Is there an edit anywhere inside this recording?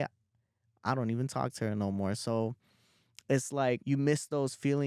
yes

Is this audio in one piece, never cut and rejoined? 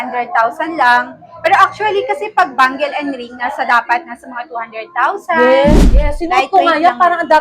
no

